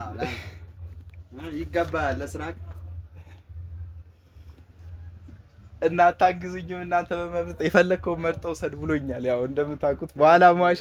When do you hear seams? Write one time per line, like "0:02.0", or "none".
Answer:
none